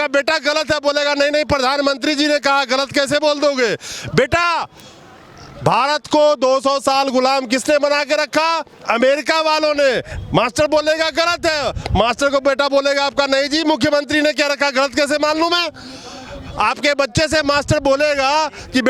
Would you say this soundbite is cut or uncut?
uncut